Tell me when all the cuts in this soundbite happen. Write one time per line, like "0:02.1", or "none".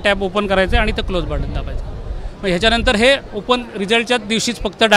none